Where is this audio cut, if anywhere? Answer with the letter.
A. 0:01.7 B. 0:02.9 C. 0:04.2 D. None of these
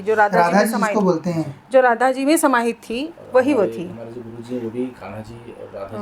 D